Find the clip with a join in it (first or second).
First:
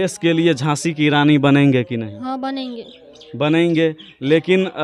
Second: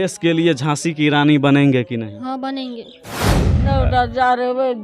second